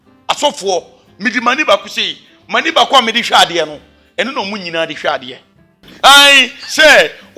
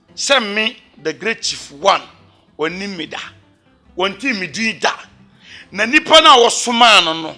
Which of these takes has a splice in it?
first; 1 cut; at 5.8 s

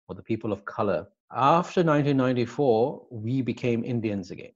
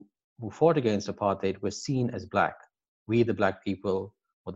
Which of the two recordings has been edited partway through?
first; 1 cut; at 1.2 s

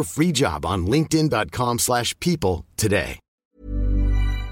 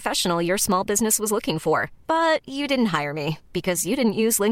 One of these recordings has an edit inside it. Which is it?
first; 1 cut; at 3.5 s

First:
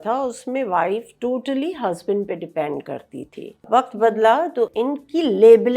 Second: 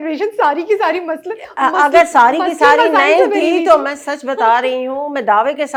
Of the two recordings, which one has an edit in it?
first; 2 cuts; at 3.6 s, 4.7 s

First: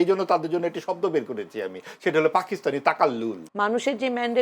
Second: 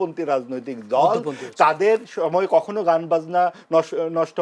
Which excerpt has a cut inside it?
first; 1 cut; at 3.4 s

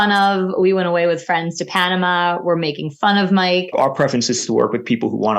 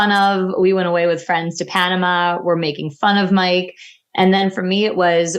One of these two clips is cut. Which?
first; 1 cut; at 3.7 s

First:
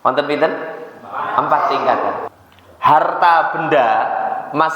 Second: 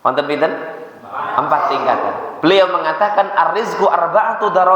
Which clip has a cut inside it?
first; 1 cut; at 2.3 s

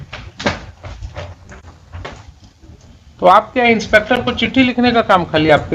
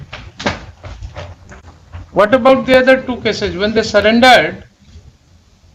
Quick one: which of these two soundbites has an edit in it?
first; 1 cut; at 2.1 s

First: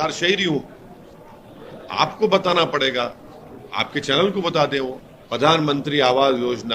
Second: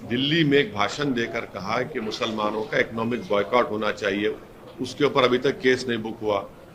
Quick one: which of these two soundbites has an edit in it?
first; 1 cut; at 5.0 s

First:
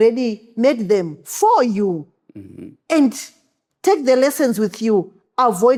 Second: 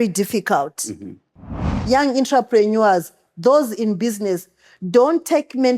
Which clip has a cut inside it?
second; 1 cut; at 1.7 s

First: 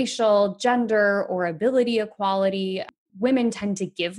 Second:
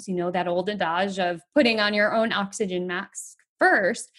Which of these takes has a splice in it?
first; 1 cut; at 3.0 s

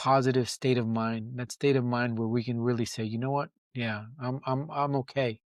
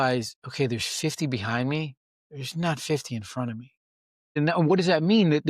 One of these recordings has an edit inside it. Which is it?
second; 1 cut; at 4.4 s

